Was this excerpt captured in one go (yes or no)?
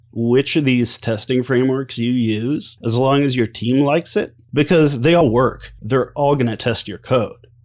no